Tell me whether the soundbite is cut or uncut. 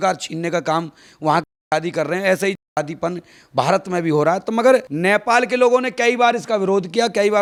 uncut